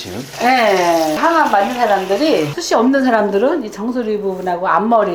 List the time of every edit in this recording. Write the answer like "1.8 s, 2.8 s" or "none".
1.2 s, 2.6 s